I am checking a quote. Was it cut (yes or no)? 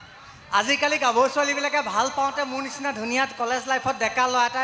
no